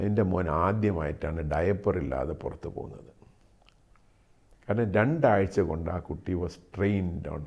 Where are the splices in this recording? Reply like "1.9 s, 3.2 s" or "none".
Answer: none